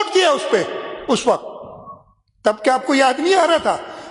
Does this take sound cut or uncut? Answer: uncut